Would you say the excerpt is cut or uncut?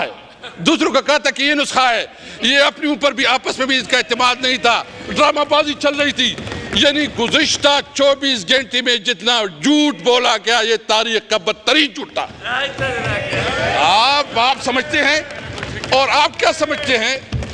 uncut